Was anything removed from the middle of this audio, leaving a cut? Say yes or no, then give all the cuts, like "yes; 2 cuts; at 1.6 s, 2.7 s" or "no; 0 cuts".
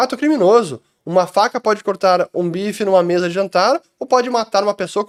no; 0 cuts